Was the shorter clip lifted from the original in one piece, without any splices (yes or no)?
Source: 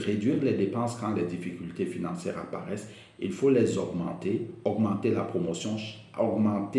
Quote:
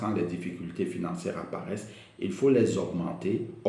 yes